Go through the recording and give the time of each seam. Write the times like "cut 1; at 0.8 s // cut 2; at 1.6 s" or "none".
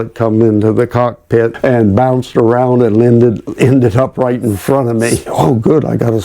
cut 1; at 1.5 s // cut 2; at 5.2 s